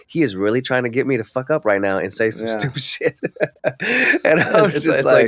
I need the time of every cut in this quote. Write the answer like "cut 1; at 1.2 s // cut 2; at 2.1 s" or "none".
none

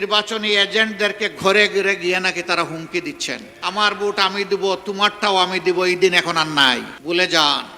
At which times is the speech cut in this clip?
cut 1; at 3.5 s // cut 2; at 6.9 s

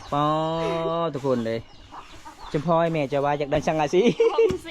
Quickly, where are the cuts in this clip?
cut 1; at 3.6 s

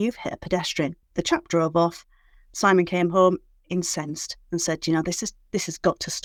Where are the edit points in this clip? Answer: none

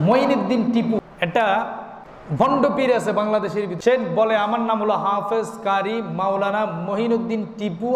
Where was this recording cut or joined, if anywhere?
cut 1; at 1.0 s // cut 2; at 2.2 s // cut 3; at 3.7 s

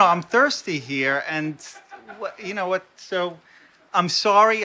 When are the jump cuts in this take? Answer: none

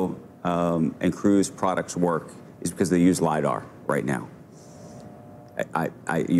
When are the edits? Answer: none

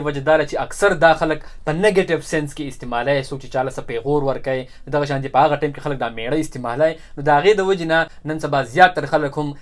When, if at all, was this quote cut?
cut 1; at 8.2 s

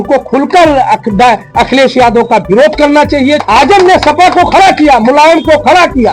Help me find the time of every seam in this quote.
cut 1; at 3.4 s

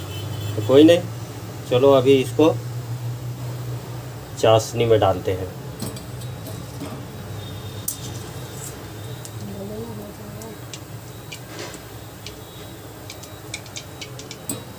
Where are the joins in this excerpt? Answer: none

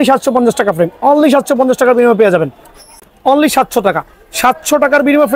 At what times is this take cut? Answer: cut 1; at 3.0 s

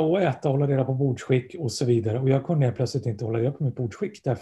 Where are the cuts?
none

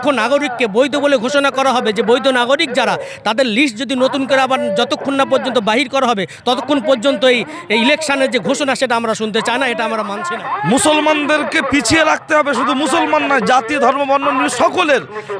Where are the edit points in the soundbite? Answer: cut 1; at 10.2 s

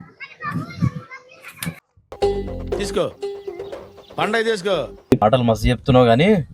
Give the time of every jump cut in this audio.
cut 1; at 5.2 s

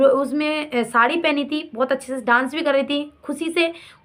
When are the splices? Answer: none

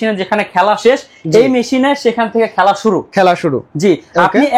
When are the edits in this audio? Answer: none

